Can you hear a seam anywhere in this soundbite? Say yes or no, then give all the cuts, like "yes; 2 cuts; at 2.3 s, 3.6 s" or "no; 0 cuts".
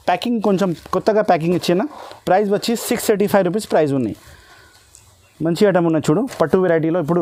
no; 0 cuts